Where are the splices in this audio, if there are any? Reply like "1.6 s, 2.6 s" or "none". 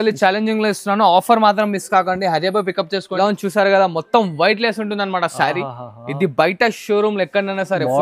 3.1 s

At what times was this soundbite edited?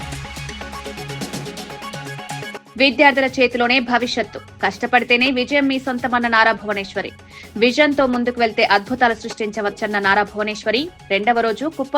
2.5 s

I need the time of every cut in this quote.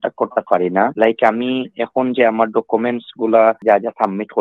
0.9 s, 3.6 s

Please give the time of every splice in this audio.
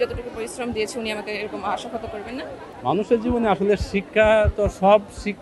2.7 s

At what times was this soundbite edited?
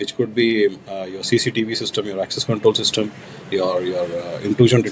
none

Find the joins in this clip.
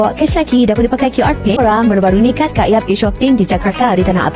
1.6 s

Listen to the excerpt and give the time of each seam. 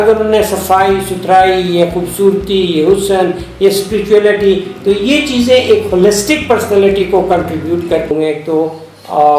8.1 s

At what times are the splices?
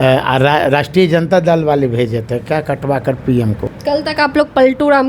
3.7 s

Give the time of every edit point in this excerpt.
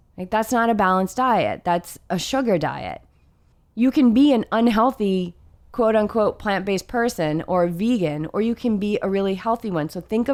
none

